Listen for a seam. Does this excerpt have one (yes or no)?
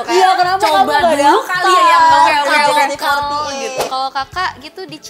yes